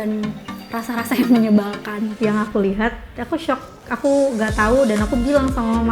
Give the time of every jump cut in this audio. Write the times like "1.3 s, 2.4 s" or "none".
2.1 s